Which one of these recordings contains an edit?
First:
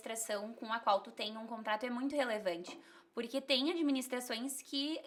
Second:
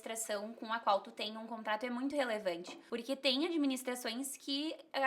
second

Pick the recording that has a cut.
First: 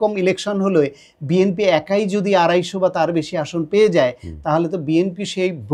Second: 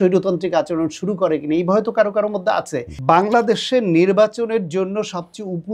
second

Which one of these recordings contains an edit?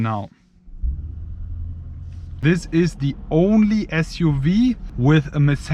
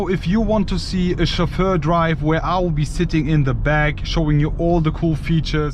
first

